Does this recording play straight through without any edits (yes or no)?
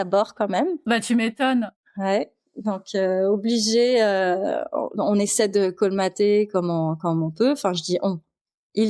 yes